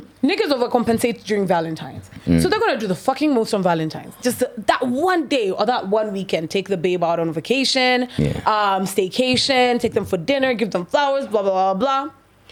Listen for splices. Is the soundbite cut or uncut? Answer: uncut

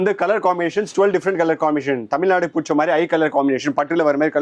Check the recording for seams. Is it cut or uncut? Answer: uncut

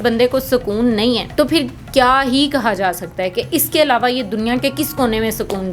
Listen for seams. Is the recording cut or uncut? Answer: cut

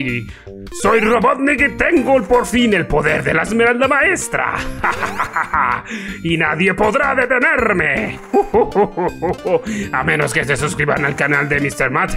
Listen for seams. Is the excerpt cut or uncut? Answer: uncut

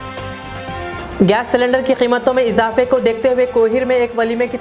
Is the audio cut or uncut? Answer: cut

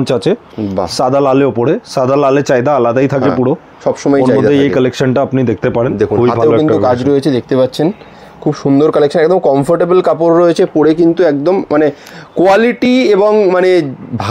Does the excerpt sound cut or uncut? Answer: uncut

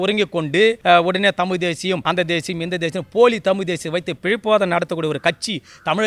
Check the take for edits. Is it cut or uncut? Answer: cut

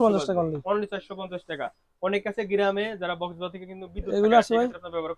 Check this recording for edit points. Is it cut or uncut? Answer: uncut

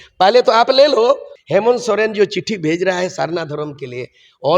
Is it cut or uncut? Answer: cut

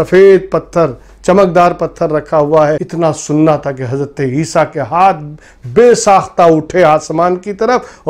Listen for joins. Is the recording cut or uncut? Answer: cut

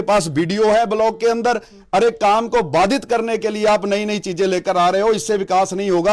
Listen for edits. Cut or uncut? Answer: uncut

